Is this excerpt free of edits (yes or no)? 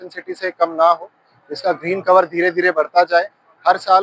yes